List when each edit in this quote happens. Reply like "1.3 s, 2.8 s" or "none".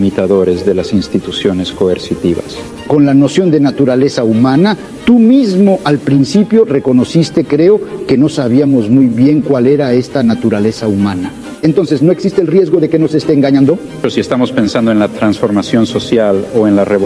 2.7 s, 14.0 s